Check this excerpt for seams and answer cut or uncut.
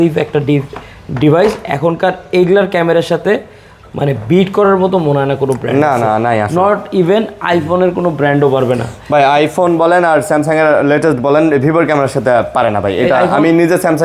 uncut